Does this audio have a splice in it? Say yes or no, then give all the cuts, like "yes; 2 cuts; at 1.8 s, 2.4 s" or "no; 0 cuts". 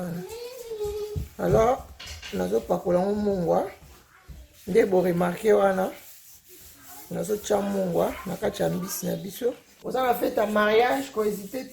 yes; 1 cut; at 9.7 s